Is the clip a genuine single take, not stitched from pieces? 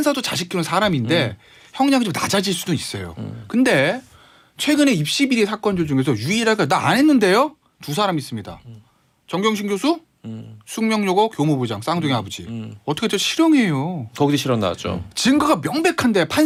yes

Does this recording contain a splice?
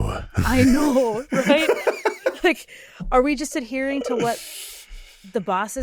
no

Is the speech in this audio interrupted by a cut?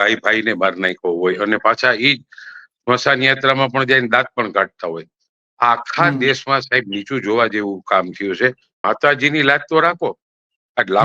yes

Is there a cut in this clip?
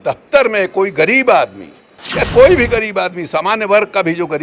yes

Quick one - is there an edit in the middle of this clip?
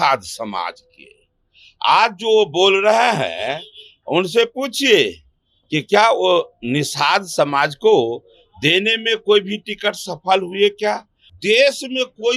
yes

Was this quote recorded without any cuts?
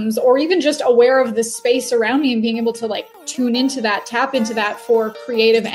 yes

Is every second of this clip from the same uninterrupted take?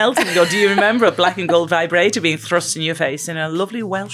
yes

